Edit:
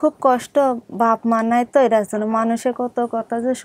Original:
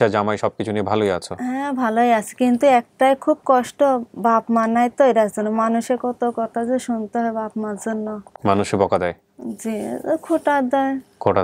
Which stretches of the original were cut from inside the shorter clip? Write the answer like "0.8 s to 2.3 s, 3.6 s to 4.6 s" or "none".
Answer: none